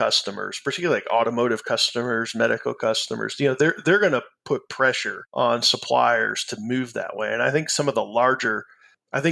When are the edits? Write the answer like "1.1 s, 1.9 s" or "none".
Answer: none